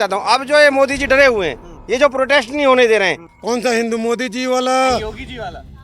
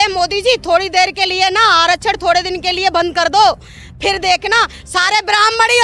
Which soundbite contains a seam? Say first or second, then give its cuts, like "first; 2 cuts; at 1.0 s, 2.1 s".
first; 1 cut; at 3.2 s